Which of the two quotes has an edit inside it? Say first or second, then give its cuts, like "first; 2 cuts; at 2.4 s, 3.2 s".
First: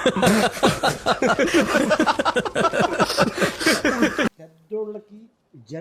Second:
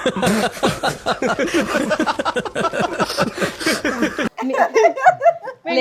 first; 1 cut; at 4.3 s